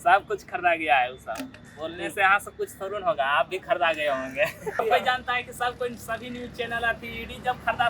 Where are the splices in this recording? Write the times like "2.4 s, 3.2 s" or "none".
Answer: 4.8 s